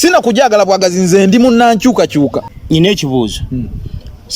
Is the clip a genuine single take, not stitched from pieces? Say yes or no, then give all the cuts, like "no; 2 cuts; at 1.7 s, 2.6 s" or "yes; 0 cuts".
no; 1 cut; at 2.5 s